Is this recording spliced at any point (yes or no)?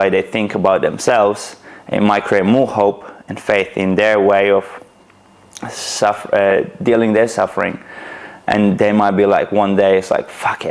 no